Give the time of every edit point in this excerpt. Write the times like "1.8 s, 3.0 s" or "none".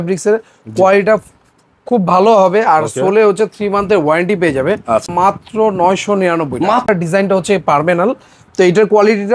5.1 s, 6.9 s